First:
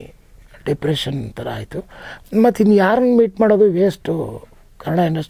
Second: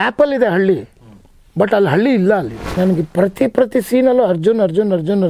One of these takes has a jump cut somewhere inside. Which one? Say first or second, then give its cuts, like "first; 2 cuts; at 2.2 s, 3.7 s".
second; 1 cut; at 2.7 s